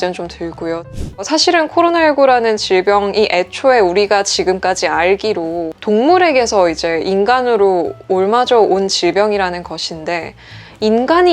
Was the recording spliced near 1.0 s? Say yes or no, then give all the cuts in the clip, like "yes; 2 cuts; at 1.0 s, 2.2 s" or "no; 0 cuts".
yes; 1 cut; at 1.0 s